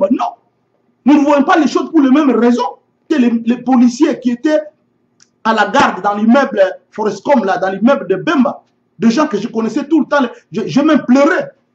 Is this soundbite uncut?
no; 1 cut; at 3.1 s

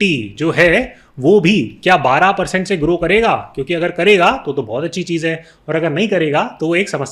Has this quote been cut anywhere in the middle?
no; 0 cuts

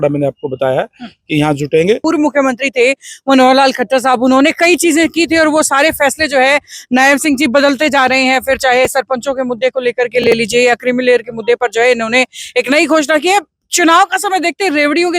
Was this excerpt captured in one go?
no; 1 cut; at 2.0 s

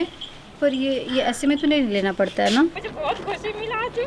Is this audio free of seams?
no; 1 cut; at 2.8 s

